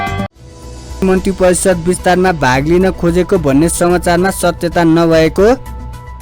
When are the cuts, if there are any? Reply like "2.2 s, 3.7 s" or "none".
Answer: 0.9 s